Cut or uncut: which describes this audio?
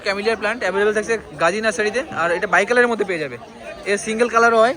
uncut